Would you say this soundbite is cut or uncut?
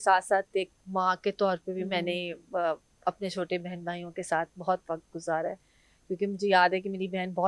uncut